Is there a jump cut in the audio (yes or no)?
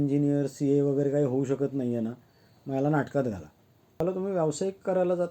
yes